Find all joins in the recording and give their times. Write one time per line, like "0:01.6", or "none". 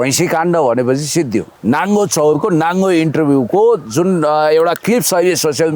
0:01.5